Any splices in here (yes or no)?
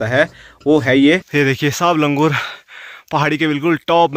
yes